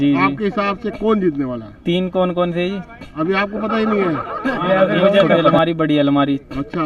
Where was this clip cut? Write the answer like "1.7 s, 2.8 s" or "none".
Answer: 5.6 s